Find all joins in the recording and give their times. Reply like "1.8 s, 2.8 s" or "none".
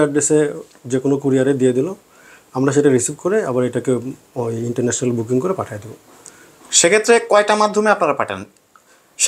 none